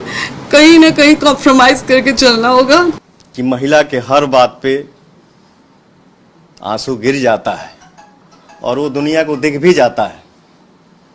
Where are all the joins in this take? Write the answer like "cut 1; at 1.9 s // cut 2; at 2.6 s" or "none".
cut 1; at 3.0 s